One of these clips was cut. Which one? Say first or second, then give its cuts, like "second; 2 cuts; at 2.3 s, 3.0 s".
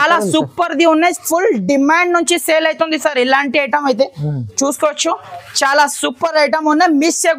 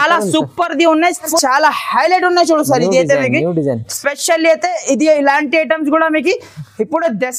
second; 1 cut; at 1.3 s